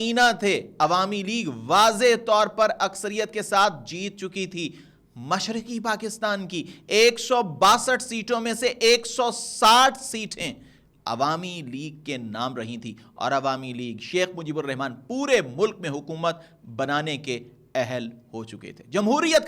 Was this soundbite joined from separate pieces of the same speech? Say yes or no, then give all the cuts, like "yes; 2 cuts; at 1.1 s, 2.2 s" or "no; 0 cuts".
no; 0 cuts